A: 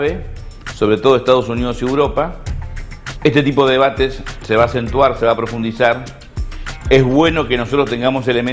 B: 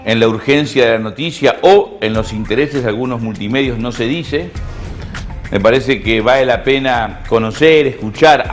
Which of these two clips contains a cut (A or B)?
B